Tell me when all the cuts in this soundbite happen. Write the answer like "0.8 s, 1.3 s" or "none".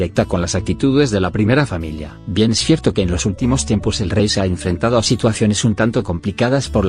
4.9 s